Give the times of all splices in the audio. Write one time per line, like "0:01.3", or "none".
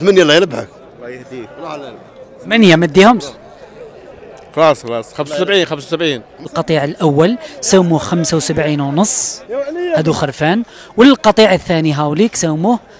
0:06.5